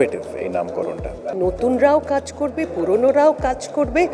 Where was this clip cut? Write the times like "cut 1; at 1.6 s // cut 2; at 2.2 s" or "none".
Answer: cut 1; at 1.4 s